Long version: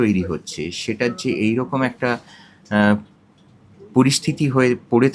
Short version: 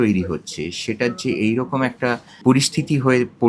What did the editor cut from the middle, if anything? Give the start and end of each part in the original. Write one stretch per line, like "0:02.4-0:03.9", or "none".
0:02.3-0:03.8